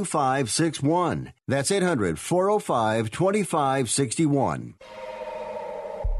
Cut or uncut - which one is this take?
cut